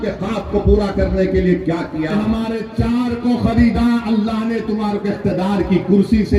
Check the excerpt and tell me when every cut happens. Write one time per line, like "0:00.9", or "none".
0:02.1